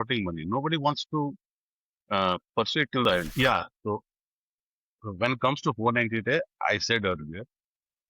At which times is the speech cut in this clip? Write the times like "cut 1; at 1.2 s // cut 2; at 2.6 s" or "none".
cut 1; at 3.3 s